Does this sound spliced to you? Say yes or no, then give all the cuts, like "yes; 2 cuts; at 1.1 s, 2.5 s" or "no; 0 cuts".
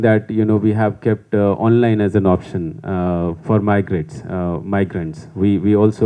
no; 0 cuts